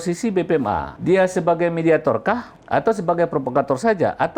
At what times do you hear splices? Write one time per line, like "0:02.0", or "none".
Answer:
0:00.9
0:02.5